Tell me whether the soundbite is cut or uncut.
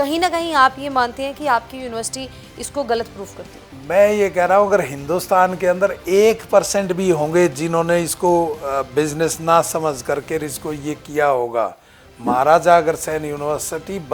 uncut